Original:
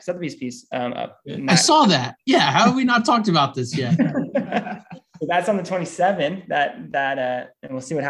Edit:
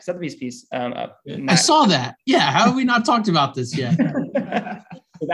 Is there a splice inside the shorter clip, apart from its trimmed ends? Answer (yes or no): no